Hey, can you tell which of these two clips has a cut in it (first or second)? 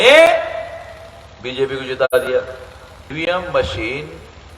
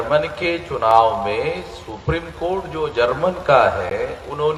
first